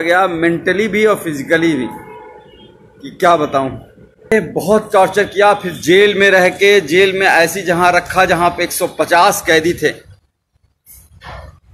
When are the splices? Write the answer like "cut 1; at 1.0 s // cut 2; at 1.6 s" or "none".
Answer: cut 1; at 4.3 s